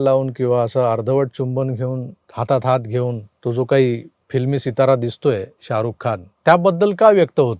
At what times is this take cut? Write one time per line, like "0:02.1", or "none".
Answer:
none